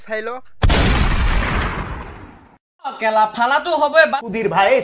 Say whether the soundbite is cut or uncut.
uncut